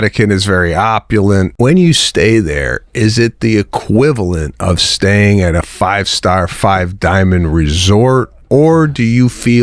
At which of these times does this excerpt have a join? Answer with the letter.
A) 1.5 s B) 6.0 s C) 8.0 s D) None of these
A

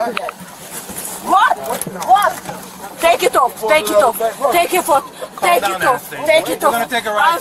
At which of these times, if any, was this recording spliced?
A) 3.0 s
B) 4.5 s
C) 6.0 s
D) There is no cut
A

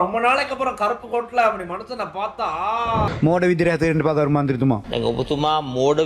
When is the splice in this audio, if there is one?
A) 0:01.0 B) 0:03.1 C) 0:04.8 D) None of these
B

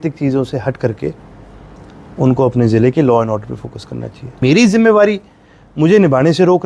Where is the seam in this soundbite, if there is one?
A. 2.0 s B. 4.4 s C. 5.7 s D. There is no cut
B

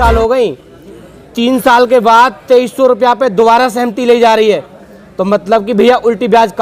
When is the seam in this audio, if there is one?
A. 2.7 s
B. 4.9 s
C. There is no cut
C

